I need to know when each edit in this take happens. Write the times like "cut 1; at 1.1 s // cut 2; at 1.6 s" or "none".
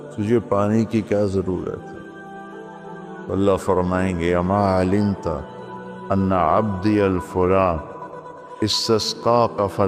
none